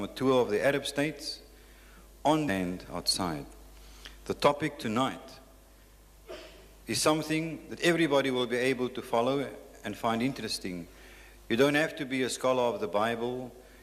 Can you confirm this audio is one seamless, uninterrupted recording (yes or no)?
yes